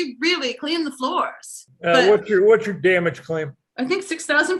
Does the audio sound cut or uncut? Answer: cut